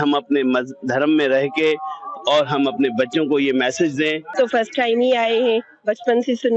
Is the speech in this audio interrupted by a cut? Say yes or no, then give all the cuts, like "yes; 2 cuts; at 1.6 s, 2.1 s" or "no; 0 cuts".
yes; 1 cut; at 4.3 s